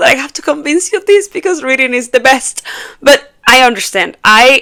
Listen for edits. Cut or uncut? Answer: uncut